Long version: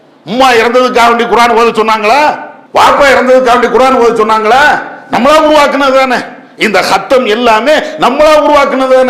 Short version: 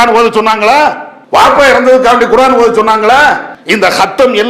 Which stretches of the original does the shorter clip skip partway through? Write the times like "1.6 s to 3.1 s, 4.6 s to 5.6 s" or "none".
4.9 s to 6.4 s